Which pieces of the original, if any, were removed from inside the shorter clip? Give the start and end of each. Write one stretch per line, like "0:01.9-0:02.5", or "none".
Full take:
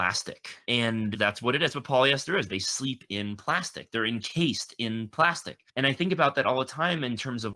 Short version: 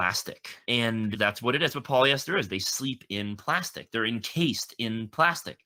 none